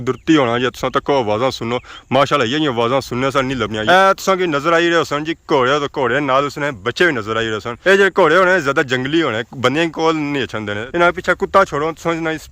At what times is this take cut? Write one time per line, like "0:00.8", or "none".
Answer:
0:03.8
0:07.9
0:10.8